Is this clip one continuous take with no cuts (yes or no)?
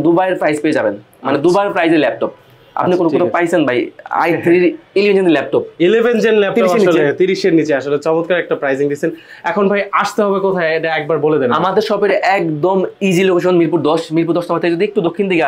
yes